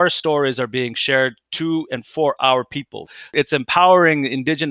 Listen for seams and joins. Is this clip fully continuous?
no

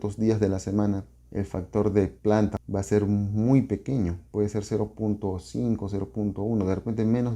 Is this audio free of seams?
no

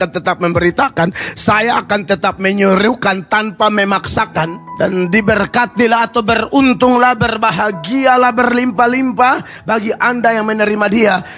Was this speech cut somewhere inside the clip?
yes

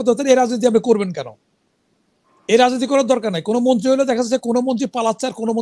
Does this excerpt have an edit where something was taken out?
no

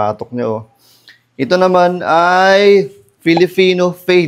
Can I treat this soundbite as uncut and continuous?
yes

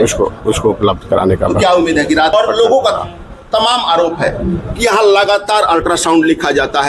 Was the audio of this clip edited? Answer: yes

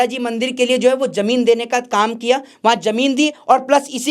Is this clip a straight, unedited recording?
yes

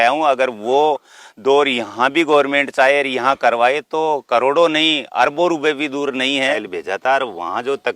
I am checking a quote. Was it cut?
yes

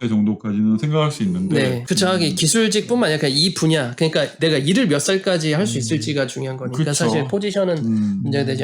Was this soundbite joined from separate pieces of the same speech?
yes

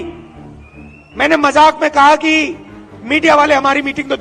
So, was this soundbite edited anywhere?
no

